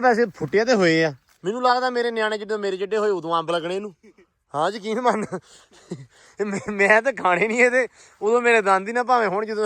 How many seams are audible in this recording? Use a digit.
1